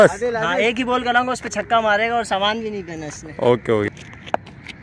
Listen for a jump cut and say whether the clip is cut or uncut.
cut